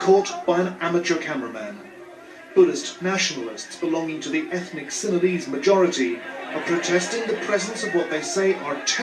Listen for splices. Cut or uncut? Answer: uncut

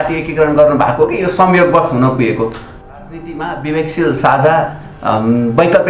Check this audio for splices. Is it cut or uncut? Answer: cut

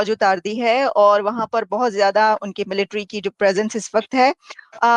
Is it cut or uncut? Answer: uncut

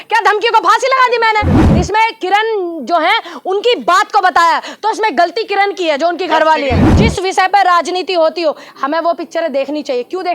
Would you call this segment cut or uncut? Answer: cut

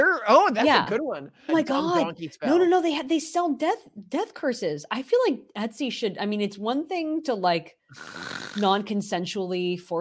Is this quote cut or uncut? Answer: cut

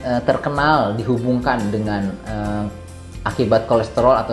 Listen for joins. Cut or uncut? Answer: uncut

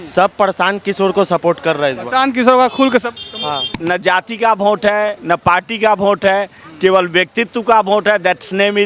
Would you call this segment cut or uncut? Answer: cut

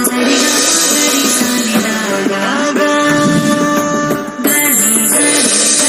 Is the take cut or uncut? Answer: uncut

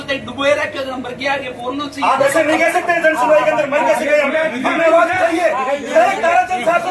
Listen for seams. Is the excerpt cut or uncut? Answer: uncut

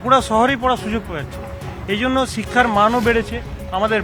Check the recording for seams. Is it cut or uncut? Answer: uncut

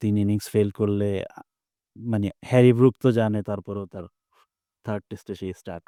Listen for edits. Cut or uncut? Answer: uncut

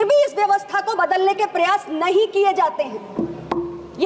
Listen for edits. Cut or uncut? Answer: uncut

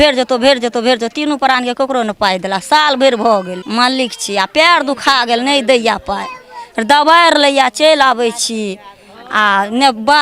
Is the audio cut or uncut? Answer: cut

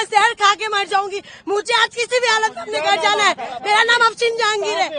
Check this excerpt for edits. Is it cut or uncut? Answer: uncut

